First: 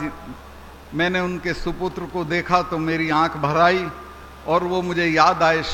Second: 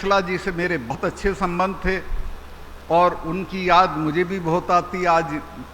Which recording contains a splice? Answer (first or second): second